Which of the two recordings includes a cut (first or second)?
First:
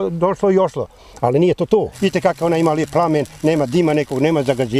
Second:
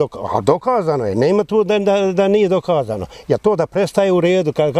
first